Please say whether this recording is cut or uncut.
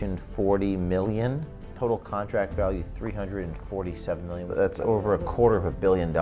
cut